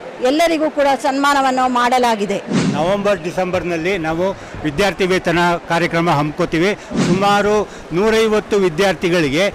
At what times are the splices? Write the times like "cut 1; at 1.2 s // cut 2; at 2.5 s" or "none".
none